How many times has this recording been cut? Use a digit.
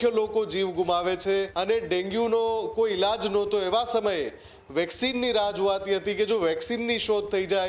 1